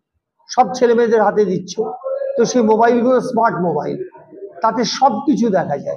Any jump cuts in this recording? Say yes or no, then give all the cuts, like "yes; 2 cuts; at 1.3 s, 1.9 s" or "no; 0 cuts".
no; 0 cuts